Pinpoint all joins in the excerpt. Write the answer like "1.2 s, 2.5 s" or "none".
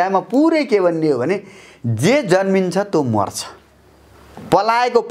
none